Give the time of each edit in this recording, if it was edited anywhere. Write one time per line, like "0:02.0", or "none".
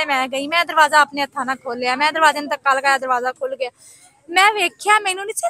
none